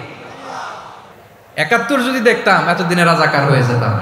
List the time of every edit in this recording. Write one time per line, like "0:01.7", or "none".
0:01.0